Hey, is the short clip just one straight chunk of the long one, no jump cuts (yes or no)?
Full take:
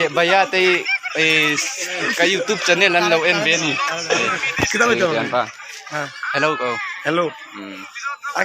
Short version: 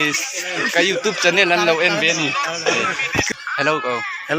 no